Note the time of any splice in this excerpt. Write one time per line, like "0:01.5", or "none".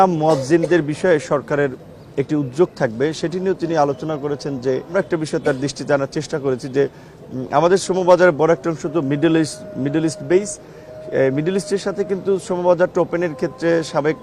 0:04.9

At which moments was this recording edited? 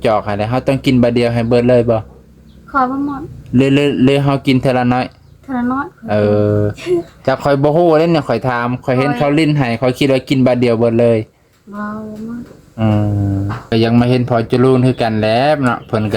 0:13.7

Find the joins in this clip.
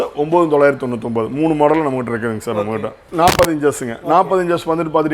0:03.0

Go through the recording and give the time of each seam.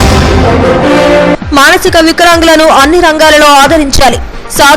0:01.0

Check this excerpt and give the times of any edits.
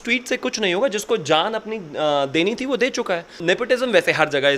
0:03.4

